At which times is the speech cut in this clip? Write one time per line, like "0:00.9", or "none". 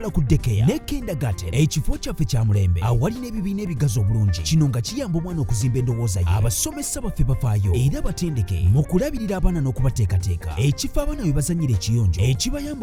none